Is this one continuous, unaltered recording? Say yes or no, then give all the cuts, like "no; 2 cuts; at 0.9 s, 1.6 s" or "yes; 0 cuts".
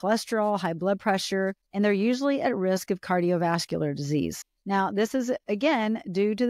no; 2 cuts; at 1.6 s, 4.5 s